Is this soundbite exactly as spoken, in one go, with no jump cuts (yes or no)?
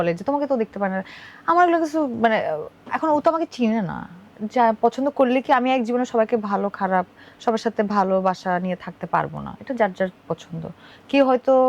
yes